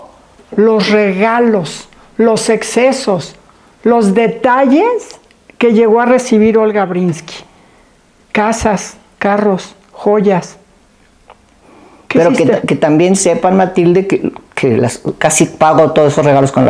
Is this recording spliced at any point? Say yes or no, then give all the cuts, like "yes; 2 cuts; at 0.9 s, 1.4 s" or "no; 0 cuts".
no; 0 cuts